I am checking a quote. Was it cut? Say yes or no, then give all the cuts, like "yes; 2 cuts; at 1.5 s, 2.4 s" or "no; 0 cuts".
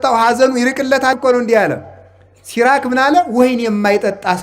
yes; 1 cut; at 1.1 s